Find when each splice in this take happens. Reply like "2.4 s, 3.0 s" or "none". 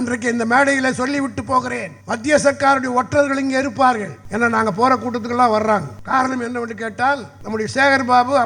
1.9 s, 4.2 s, 5.9 s, 7.4 s